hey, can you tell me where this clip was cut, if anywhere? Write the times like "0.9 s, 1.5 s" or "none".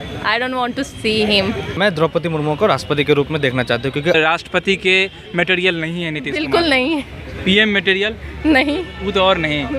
1.8 s, 4.2 s